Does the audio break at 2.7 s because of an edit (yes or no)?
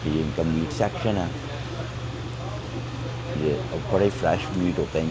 no